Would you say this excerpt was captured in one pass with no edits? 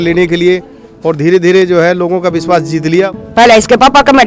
no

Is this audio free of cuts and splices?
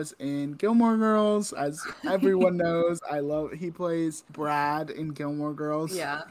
no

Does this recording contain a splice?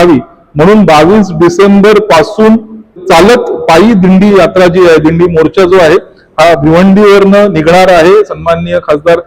yes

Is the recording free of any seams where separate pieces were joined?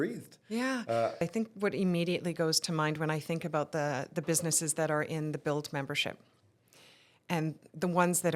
no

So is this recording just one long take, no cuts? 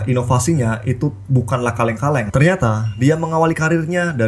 no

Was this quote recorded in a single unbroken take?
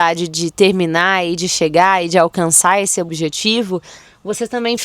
no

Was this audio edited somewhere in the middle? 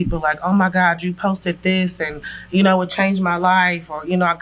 no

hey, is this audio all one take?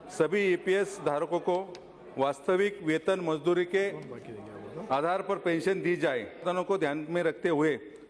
no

